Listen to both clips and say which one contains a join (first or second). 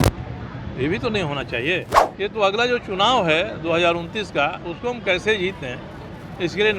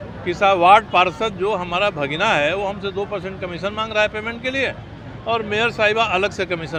first